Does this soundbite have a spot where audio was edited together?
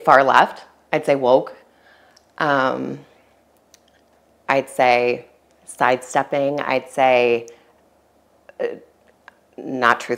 no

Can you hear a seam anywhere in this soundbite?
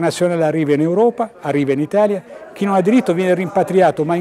no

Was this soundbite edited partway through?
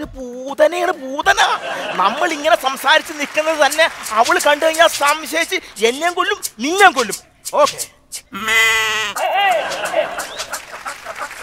yes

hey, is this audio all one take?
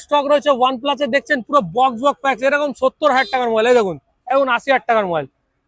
yes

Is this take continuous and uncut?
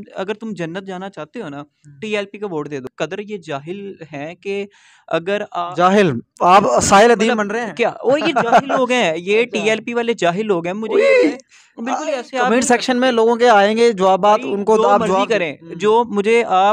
no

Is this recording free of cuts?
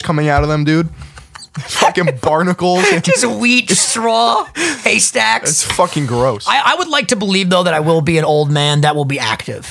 yes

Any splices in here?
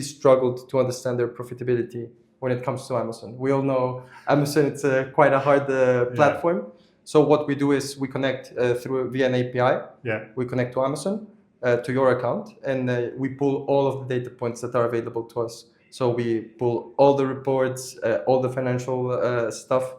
no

